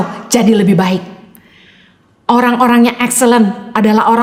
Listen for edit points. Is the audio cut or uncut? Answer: uncut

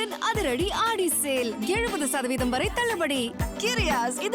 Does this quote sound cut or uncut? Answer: uncut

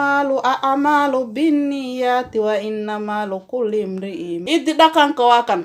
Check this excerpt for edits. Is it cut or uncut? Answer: cut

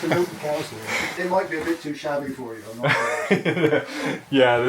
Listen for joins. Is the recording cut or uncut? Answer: cut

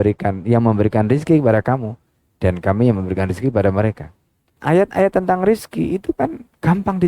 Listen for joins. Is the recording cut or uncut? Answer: cut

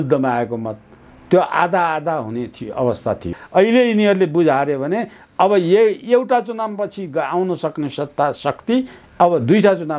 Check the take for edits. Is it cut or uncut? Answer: cut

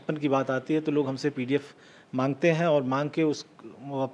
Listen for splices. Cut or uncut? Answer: uncut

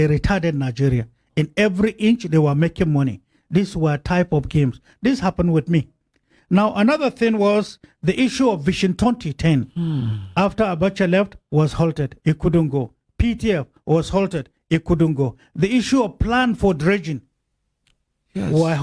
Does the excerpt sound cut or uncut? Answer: uncut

